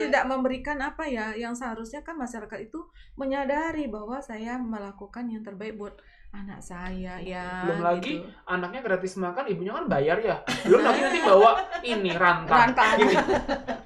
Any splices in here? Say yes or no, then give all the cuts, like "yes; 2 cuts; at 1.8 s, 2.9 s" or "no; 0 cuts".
yes; 1 cut; at 7.2 s